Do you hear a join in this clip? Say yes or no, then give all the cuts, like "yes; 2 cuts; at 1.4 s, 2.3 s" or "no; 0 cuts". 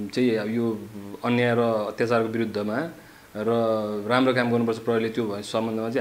no; 0 cuts